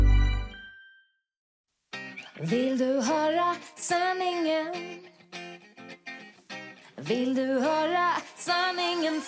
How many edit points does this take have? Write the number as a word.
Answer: one